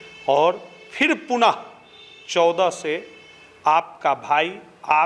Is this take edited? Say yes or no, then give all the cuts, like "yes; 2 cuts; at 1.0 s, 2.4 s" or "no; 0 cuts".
no; 0 cuts